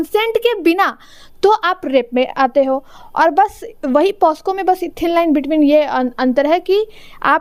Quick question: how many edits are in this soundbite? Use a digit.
0